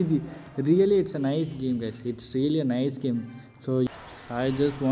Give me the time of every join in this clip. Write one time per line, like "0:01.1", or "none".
0:03.9